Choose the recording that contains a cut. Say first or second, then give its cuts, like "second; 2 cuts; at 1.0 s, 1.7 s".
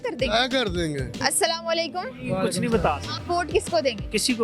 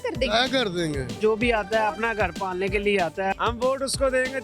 second; 2 cuts; at 1.1 s, 3.3 s